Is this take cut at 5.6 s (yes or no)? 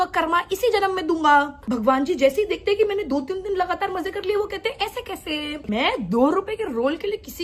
yes